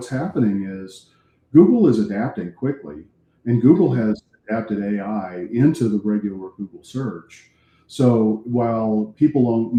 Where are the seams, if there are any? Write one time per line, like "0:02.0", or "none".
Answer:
none